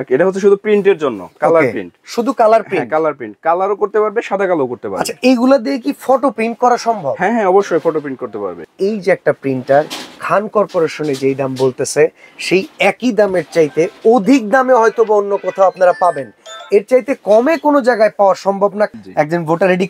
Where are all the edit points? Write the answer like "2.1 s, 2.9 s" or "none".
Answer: 8.6 s, 18.9 s

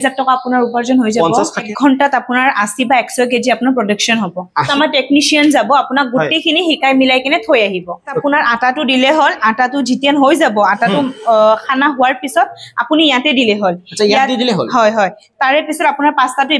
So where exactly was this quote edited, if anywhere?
1.6 s, 4.7 s, 8.2 s

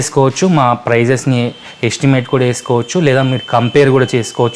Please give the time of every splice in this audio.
none

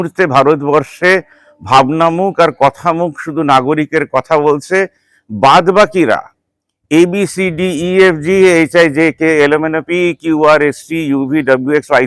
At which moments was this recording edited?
none

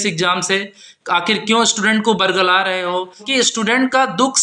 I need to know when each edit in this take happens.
3.3 s

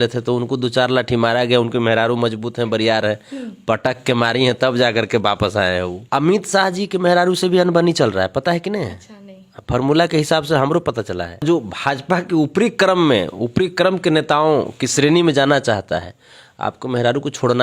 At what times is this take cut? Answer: 6.0 s, 11.4 s

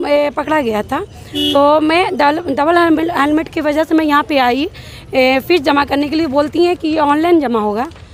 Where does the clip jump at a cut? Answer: none

